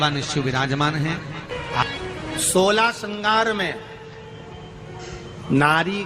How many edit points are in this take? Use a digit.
1